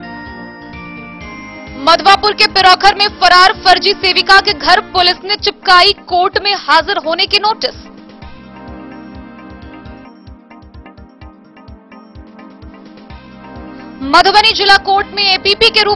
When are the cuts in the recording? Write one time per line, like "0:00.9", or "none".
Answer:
none